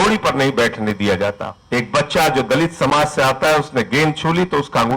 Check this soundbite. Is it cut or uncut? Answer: cut